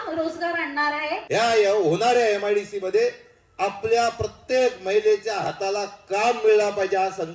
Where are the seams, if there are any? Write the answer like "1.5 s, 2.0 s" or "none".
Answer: 1.2 s